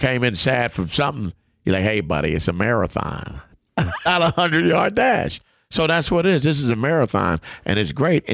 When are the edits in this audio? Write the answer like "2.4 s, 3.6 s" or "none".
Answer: 4.0 s